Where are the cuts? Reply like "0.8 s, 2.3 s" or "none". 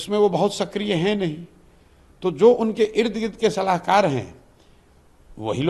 none